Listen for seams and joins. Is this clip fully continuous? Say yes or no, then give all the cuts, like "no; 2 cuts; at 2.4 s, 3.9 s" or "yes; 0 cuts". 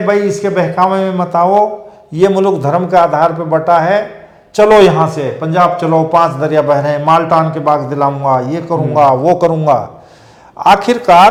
yes; 0 cuts